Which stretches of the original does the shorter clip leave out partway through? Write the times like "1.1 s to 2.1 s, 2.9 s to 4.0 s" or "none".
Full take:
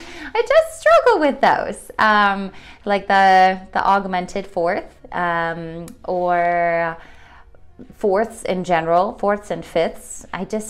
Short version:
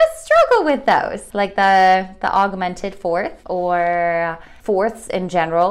1.7 s to 2.7 s, 4.9 s to 6.0 s, 7.1 s to 7.8 s